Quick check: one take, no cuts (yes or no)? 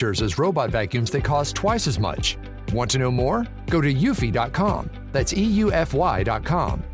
yes